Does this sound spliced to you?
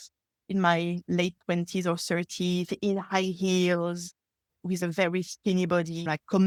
no; 0 cuts

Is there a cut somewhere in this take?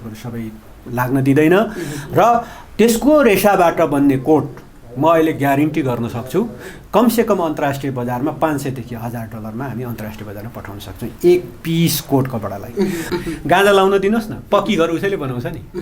yes; 1 cut; at 13.0 s

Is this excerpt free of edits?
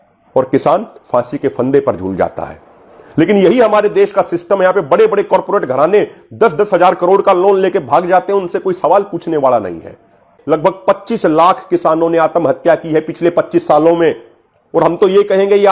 no; 1 cut; at 10.4 s

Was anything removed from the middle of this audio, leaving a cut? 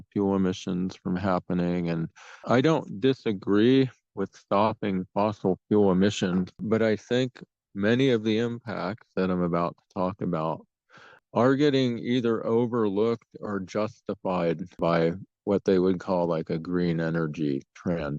yes; 4 cuts; at 2.4 s, 6.6 s, 11.2 s, 14.8 s

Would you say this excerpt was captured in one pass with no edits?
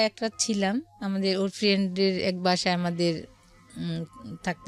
yes; 0 cuts

